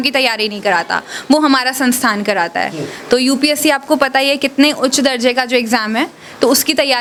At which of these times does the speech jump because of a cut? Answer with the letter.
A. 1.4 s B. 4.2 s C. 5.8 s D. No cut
D